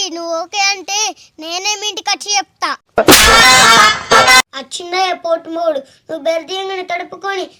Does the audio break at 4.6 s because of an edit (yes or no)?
yes